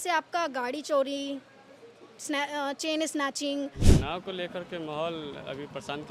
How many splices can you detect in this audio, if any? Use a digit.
1